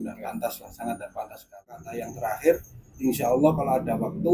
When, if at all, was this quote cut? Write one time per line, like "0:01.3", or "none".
0:01.6